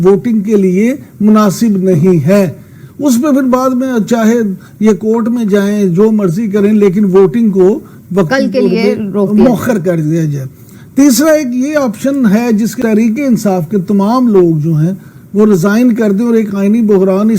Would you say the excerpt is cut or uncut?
cut